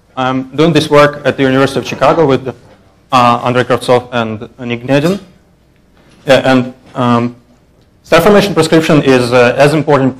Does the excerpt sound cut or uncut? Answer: cut